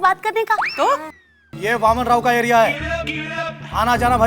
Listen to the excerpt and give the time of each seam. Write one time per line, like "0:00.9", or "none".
0:01.5